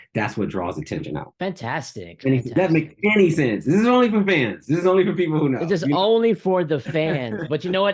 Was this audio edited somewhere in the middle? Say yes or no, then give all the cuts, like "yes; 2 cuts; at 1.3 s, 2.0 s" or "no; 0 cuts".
yes; 1 cut; at 1.3 s